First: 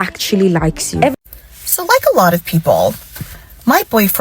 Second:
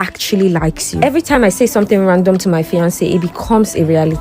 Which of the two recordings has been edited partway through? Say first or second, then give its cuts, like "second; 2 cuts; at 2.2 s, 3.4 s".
first; 1 cut; at 1.1 s